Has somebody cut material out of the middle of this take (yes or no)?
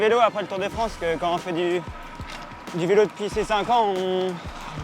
no